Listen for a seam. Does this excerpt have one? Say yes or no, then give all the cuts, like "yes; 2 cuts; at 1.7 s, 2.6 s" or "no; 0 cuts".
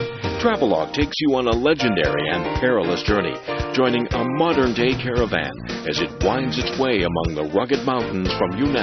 yes; 1 cut; at 4.2 s